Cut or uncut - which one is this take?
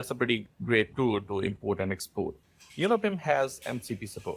cut